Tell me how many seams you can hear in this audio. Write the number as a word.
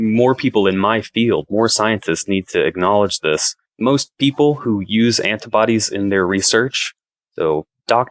one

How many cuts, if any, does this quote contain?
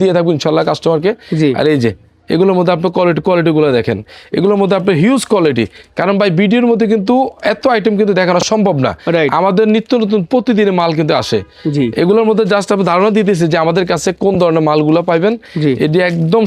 zero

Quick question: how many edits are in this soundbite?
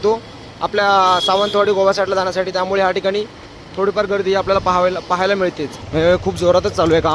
one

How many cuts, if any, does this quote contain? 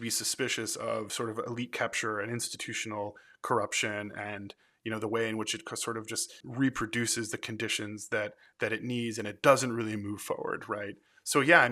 two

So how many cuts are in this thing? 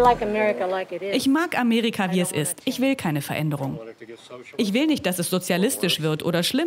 zero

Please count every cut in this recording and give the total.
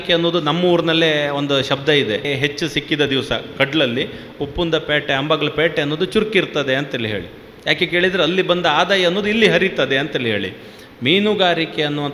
one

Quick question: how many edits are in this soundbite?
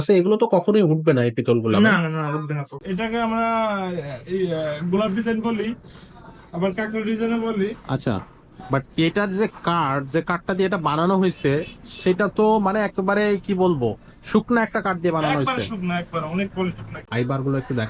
two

